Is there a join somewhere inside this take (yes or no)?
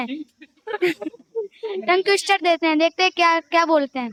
no